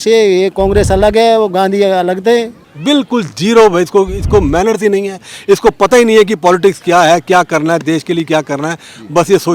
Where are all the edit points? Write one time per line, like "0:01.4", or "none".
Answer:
0:02.6